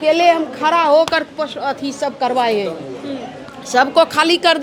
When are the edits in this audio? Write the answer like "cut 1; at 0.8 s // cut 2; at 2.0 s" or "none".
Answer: none